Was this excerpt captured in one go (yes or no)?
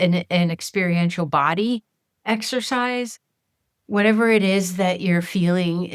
yes